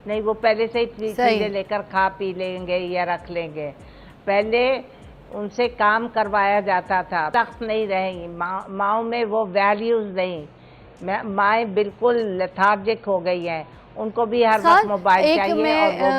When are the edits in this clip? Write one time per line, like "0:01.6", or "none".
0:07.3